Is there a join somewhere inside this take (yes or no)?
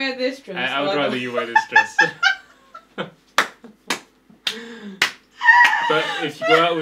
no